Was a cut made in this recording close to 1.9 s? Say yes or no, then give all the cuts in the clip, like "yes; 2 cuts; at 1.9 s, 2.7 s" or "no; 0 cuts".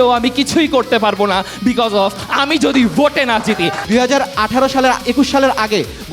no; 1 cut; at 3.8 s